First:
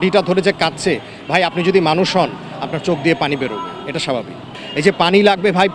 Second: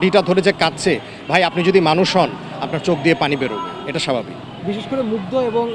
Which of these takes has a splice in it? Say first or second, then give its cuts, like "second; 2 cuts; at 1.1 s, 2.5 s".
first; 1 cut; at 4.5 s